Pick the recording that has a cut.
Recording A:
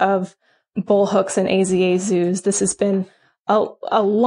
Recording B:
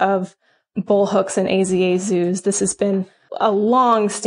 B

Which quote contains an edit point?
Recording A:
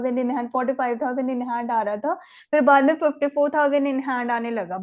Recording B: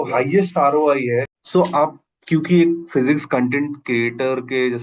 B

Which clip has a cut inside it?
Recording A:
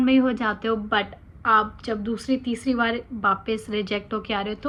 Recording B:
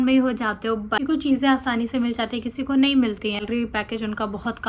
B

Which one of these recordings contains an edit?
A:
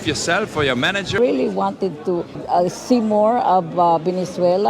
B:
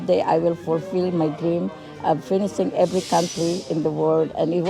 A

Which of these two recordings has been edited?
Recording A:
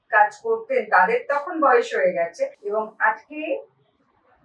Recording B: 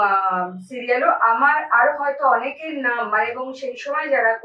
A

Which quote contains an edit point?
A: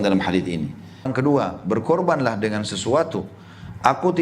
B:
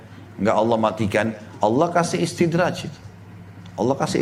A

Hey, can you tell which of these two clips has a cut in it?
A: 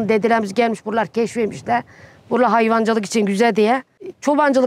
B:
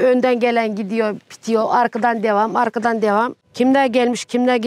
B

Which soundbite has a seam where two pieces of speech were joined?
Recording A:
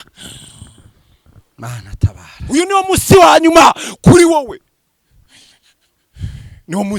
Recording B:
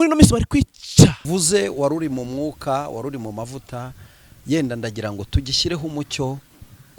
B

